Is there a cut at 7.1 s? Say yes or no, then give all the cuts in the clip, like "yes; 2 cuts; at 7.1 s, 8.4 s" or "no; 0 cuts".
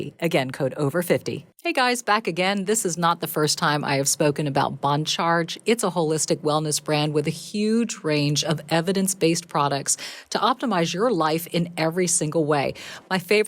no; 1 cut; at 1.5 s